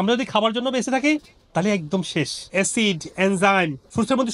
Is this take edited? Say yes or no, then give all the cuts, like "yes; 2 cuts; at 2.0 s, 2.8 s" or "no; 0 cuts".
yes; 1 cut; at 2.5 s